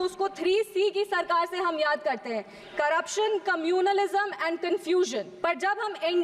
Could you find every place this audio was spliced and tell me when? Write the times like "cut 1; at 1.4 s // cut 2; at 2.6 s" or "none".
cut 1; at 5.3 s